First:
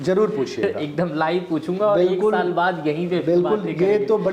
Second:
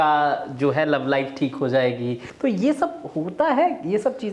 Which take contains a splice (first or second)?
second